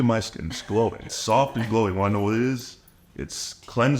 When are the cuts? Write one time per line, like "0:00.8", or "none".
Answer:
0:01.1

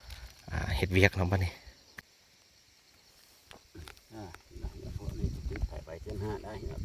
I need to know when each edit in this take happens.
0:02.0

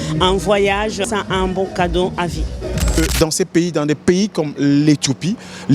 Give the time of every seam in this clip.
0:01.0
0:03.0

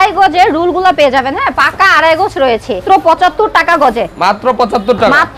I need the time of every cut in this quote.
0:02.8

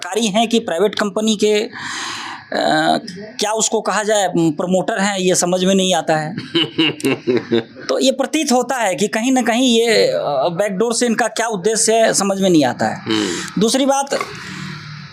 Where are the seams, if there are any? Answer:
none

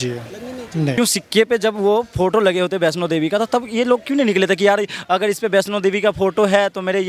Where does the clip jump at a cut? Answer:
0:00.9

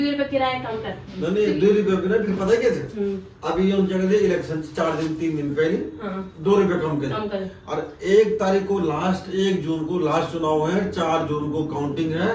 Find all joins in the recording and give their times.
none

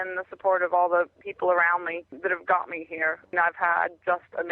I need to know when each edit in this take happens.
0:01.2
0:02.1
0:03.3

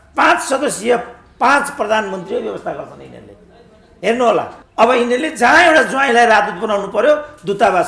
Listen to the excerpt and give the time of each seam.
0:04.6

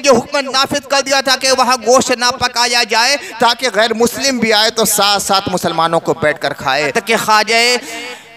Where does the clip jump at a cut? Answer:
0:06.9

